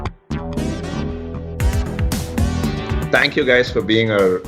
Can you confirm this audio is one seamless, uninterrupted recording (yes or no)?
yes